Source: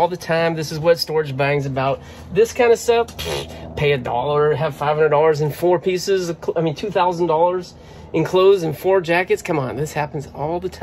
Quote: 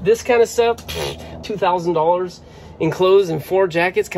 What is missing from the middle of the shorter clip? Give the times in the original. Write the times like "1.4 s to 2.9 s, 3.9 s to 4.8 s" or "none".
3.7 s to 6.8 s